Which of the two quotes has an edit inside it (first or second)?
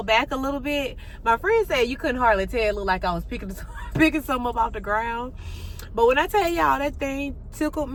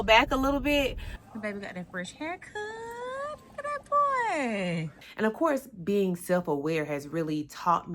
second